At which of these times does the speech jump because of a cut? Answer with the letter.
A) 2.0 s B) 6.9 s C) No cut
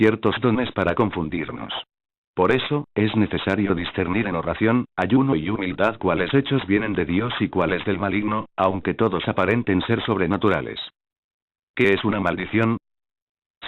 B